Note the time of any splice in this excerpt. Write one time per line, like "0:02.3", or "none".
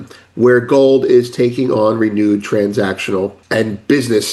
0:03.4